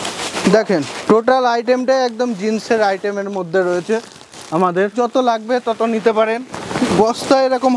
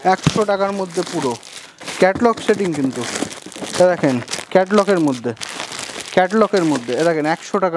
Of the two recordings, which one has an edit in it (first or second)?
first